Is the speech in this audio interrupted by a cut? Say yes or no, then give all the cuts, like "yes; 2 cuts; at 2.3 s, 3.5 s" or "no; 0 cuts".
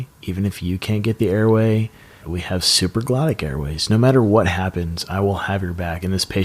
yes; 1 cut; at 2.3 s